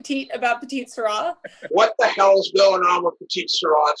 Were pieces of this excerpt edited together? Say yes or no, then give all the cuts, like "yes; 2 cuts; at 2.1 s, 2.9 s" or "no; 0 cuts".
yes; 1 cut; at 1.6 s